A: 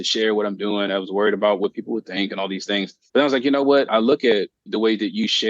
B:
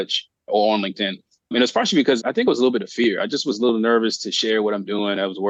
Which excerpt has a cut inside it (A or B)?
A